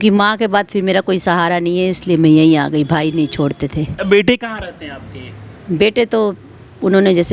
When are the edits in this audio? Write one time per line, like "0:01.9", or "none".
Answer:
0:04.0